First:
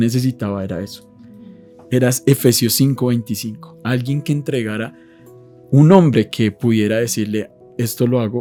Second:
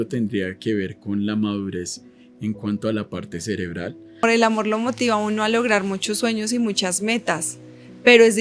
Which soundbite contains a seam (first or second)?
second